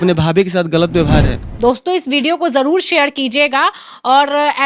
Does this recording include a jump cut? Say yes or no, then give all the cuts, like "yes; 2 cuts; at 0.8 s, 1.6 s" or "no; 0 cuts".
yes; 1 cut; at 1.4 s